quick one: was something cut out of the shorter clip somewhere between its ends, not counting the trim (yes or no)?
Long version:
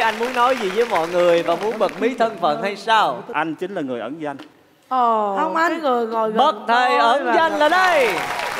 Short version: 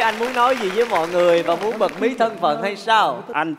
no